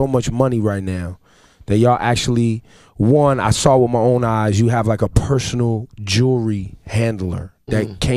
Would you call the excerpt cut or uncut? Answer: cut